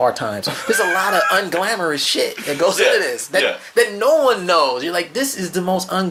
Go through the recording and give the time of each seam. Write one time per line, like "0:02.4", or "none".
none

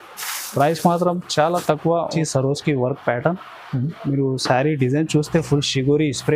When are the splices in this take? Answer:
0:02.1

